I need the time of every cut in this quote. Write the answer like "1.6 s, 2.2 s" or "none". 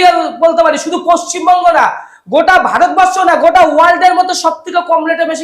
none

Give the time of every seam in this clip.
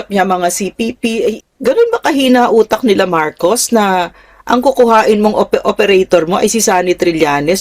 1.4 s

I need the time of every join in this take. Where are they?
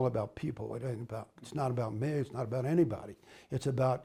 none

